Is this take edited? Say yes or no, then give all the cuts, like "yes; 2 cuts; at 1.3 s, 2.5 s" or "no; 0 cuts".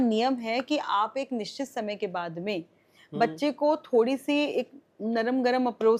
no; 0 cuts